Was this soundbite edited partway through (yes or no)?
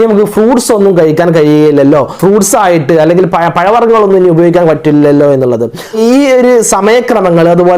yes